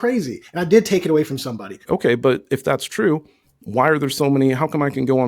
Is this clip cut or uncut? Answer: cut